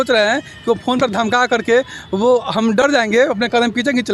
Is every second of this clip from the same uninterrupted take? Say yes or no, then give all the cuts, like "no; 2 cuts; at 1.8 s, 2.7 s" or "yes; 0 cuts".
yes; 0 cuts